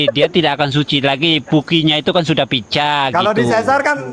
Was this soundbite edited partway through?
no; 0 cuts

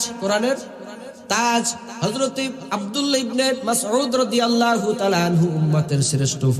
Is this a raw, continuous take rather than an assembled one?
no; 1 cut; at 2.6 s

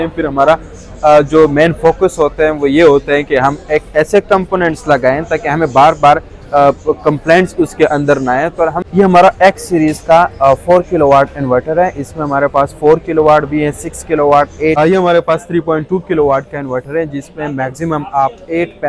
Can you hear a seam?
yes; 2 cuts; at 8.8 s, 14.8 s

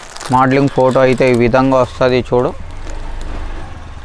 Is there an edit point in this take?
no; 0 cuts

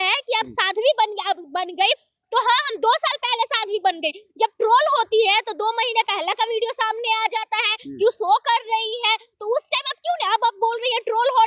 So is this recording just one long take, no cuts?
yes; 0 cuts

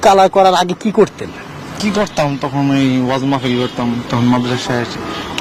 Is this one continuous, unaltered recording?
yes; 0 cuts

